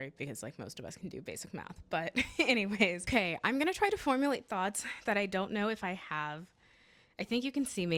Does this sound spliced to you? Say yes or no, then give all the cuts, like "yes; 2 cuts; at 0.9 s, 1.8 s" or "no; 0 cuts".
yes; 1 cut; at 3.0 s